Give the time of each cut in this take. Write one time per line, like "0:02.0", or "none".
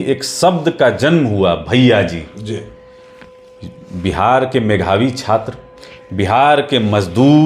none